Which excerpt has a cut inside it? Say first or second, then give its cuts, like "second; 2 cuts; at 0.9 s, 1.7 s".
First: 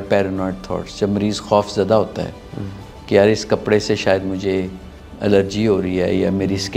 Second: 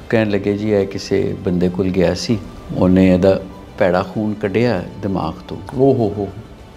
second; 1 cut; at 2.6 s